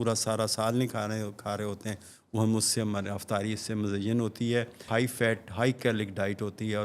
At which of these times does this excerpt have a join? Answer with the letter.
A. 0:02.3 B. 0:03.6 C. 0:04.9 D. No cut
C